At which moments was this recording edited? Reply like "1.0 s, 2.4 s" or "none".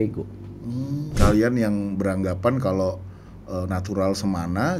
1.1 s